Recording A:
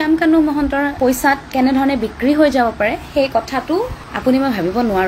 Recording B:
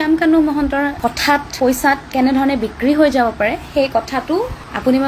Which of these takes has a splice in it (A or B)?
A